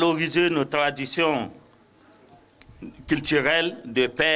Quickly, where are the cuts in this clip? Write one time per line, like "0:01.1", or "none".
none